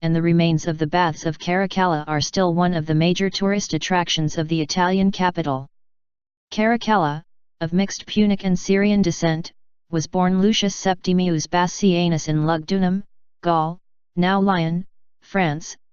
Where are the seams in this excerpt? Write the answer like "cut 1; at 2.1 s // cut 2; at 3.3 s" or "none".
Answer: none